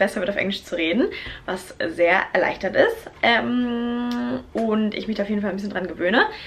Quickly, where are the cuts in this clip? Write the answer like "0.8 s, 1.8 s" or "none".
none